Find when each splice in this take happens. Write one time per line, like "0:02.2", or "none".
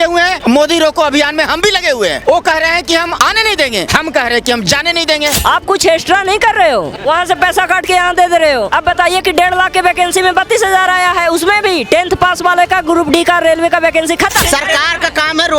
0:05.4
0:14.4